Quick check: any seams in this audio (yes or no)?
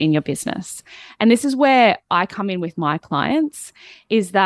no